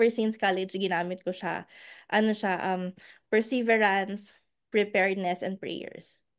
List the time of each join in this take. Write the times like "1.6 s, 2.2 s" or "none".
none